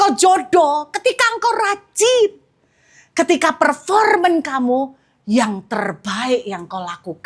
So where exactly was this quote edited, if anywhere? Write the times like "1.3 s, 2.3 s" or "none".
none